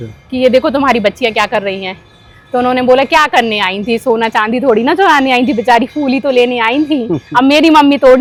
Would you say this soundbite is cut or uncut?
uncut